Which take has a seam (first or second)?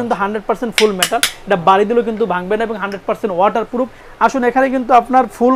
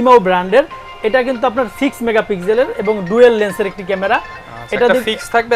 first